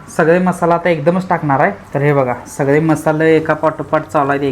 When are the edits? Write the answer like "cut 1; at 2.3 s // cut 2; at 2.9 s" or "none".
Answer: cut 1; at 1.8 s